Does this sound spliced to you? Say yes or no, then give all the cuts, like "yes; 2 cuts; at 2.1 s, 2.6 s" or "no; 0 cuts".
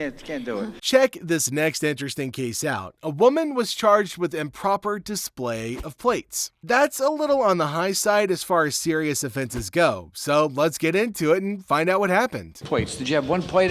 no; 0 cuts